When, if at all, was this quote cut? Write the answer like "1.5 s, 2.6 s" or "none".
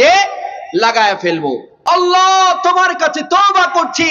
1.7 s

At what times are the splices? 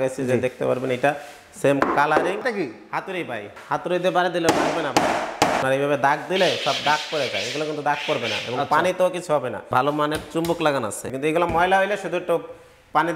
2.4 s, 3.5 s, 5.6 s, 9.6 s, 11.0 s

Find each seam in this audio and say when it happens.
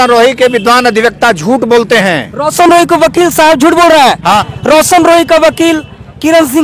4.5 s

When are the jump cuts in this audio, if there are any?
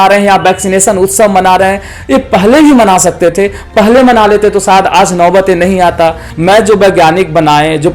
6.3 s

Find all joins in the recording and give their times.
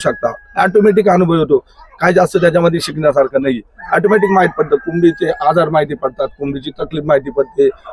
none

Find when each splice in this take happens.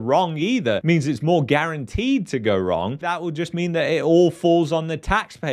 3.0 s

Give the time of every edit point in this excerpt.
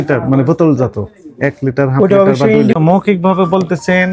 2.8 s

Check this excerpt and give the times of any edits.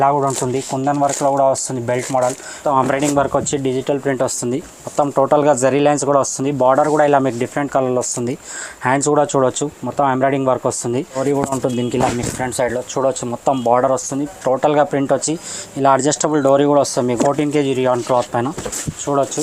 2.6 s, 11.2 s, 17.2 s

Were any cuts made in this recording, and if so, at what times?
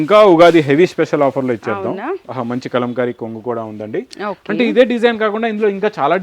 2.2 s

